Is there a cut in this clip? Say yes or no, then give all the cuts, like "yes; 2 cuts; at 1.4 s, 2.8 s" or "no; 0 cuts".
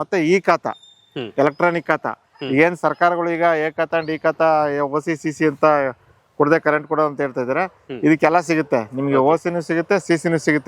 no; 0 cuts